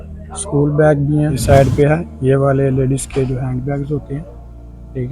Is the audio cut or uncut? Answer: cut